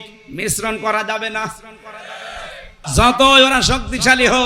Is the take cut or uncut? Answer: cut